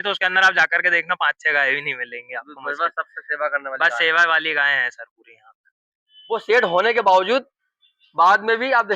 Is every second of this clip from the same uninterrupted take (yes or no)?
no